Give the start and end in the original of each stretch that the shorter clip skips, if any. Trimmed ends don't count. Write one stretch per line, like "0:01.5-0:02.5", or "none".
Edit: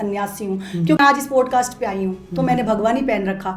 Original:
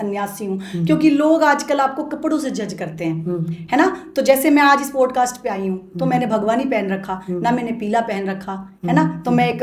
0:01.0-0:04.6